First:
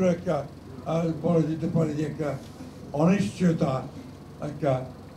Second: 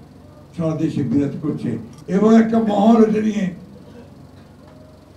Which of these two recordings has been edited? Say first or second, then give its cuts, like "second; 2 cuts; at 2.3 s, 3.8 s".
second; 1 cut; at 1.9 s